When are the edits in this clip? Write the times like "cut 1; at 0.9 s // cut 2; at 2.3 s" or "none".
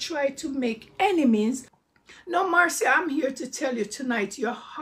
cut 1; at 1.8 s

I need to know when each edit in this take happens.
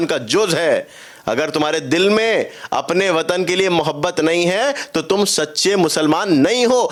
none

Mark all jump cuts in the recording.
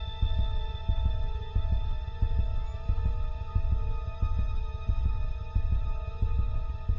none

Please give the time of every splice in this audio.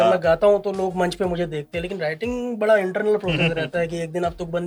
none

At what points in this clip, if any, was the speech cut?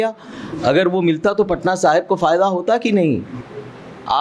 none

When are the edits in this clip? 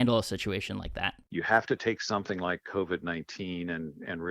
cut 1; at 1.2 s

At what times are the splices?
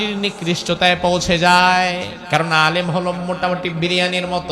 cut 1; at 2.1 s

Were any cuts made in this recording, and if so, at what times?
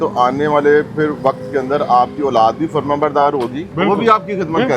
cut 1; at 3.6 s

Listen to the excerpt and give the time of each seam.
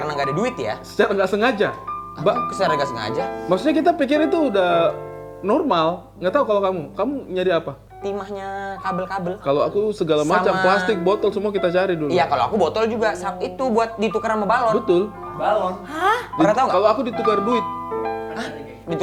none

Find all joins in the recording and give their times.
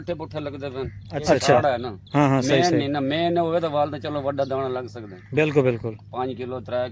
cut 1; at 1.6 s

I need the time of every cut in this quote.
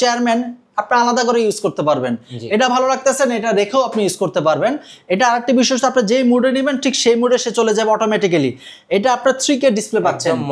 none

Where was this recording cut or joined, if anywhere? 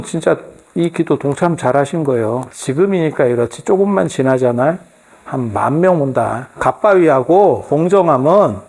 cut 1; at 2.5 s // cut 2; at 6.5 s // cut 3; at 7.6 s

